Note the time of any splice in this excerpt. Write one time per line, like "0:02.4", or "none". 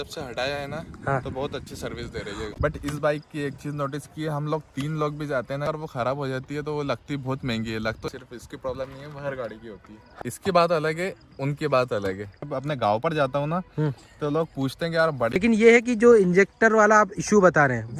0:02.5
0:05.7
0:08.0
0:10.0
0:12.4
0:15.4